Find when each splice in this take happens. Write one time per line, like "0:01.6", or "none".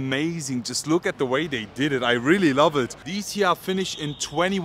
0:03.0